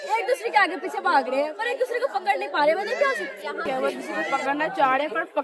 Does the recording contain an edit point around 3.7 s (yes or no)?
yes